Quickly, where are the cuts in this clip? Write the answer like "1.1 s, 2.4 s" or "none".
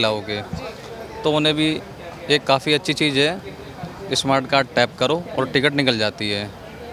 none